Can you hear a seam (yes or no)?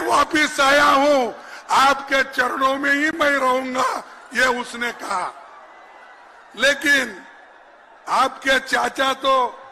no